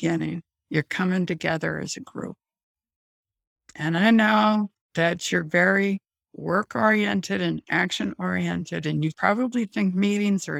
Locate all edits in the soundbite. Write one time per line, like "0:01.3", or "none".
0:09.2